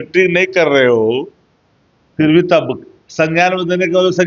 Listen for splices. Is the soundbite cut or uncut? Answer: uncut